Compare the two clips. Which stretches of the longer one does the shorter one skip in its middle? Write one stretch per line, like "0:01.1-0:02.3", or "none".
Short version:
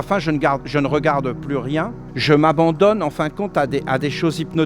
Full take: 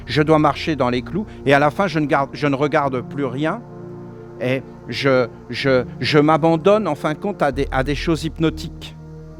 0:03.8-0:06.0